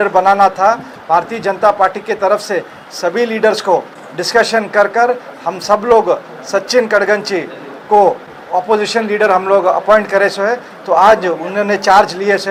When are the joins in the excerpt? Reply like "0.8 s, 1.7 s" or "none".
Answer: none